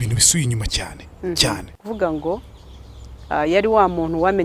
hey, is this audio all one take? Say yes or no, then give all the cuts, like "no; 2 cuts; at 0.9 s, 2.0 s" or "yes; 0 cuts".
no; 1 cut; at 1.8 s